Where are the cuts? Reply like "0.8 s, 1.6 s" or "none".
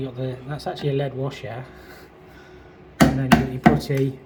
none